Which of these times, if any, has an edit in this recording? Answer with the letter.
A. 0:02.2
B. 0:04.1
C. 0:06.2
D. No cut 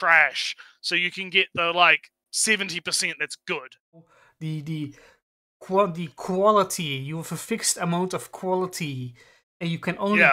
B